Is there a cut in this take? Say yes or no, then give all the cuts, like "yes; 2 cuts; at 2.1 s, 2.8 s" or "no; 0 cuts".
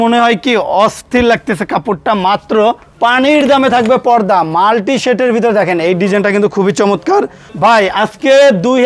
yes; 2 cuts; at 2.9 s, 7.4 s